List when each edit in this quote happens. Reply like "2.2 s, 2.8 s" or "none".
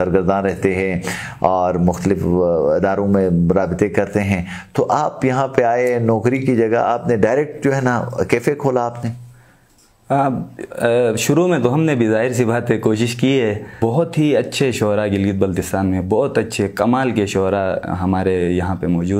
13.7 s